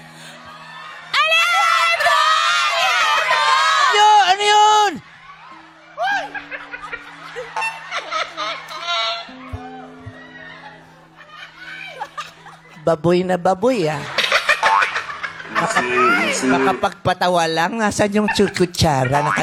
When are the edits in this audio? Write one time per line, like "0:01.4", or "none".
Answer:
none